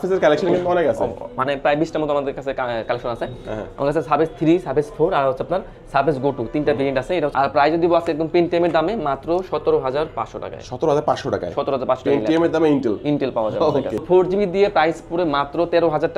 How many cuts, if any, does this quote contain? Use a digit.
2